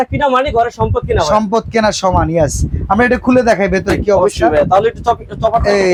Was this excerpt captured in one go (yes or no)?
yes